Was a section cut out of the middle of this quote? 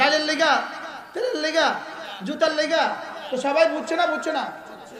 no; 0 cuts

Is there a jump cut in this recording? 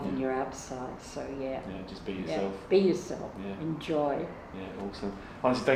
no; 0 cuts

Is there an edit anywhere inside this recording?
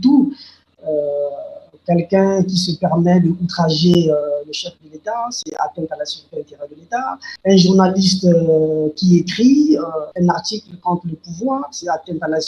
yes; 1 cut; at 7.2 s

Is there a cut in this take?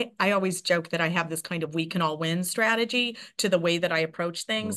no; 0 cuts

